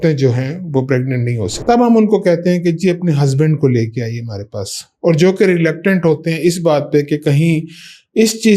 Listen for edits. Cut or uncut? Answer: cut